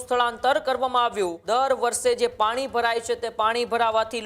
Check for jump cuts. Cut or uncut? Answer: cut